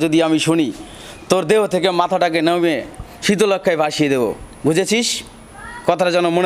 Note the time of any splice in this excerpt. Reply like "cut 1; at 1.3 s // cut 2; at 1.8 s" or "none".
none